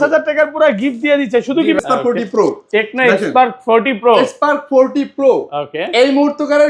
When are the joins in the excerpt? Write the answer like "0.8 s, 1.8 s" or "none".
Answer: 1.8 s